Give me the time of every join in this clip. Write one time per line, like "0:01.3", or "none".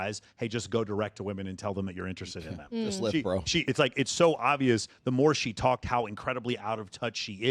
0:03.6